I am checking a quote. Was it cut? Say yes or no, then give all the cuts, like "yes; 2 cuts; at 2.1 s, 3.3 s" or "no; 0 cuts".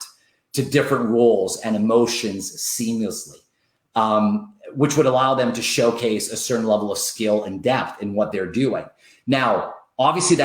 no; 0 cuts